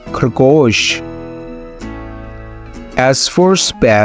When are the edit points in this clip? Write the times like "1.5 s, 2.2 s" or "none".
1.1 s, 2.9 s